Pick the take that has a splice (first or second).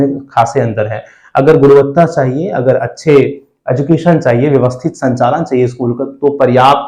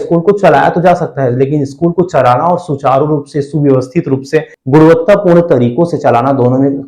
second